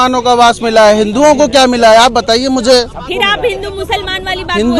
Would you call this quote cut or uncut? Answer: uncut